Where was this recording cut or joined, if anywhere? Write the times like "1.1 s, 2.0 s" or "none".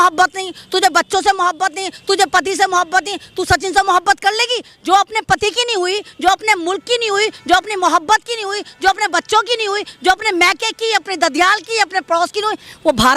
none

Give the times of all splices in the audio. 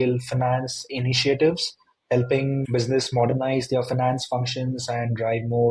none

